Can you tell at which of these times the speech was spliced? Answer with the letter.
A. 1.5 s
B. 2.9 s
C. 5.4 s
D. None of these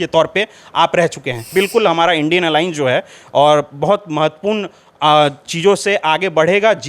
A